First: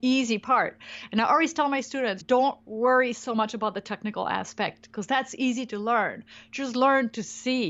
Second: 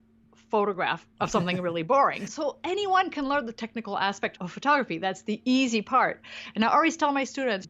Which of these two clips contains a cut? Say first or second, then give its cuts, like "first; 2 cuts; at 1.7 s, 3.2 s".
second; 2 cuts; at 1.0 s, 4.5 s